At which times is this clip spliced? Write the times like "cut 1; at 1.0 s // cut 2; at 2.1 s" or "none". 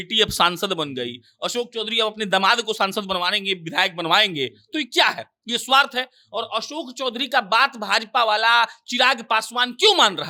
none